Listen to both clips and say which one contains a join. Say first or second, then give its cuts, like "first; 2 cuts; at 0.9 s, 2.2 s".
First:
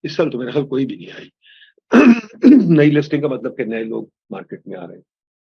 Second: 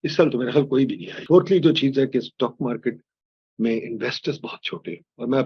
second; 1 cut; at 1.1 s